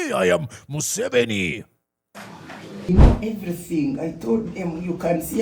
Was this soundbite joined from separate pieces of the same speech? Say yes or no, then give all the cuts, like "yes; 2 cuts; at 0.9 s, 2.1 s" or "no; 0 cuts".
yes; 1 cut; at 2.9 s